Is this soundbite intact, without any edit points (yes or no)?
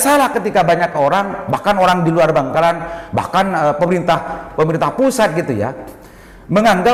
yes